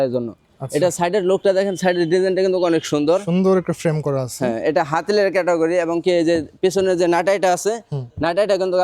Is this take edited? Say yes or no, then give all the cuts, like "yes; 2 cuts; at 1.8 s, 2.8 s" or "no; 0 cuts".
no; 0 cuts